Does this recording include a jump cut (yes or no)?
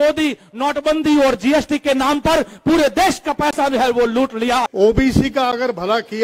yes